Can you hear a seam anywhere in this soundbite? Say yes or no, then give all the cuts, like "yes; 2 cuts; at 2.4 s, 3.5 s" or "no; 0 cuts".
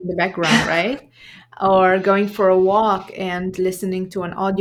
no; 0 cuts